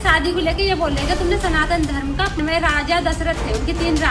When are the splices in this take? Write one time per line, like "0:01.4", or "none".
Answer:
0:02.4